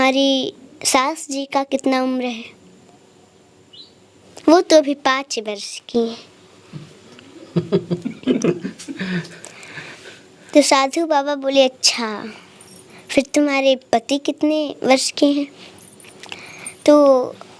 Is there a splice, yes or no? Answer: no